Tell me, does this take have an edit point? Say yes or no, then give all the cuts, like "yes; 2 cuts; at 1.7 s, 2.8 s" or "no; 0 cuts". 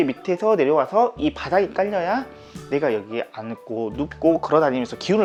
no; 0 cuts